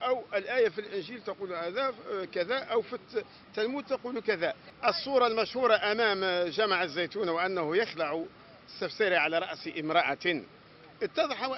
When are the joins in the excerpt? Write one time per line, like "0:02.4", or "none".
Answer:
0:04.7